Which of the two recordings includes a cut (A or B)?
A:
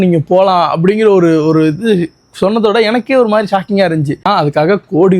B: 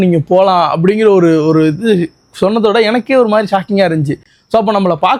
A